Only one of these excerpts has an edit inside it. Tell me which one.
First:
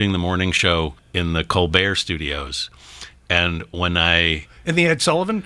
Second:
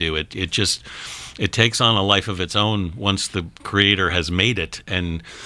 first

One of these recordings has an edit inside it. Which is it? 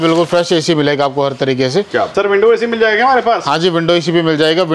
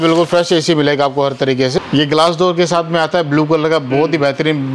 second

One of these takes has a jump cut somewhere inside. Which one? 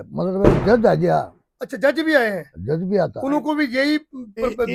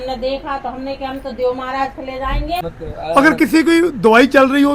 second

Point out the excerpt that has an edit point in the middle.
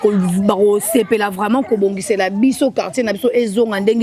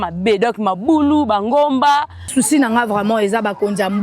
second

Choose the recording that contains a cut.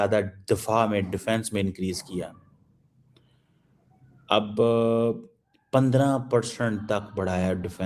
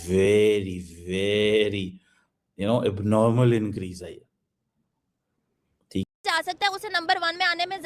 second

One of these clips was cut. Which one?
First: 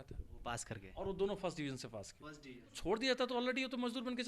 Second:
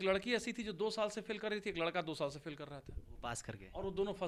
first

